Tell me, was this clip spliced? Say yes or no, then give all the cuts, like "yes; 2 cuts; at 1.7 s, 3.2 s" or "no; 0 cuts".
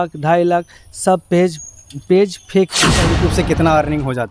yes; 1 cut; at 3.0 s